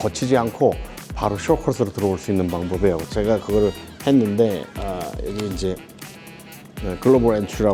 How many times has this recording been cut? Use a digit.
0